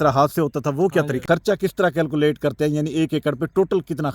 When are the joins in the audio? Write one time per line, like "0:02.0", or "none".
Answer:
0:01.2